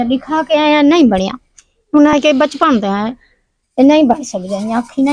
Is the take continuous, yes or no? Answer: yes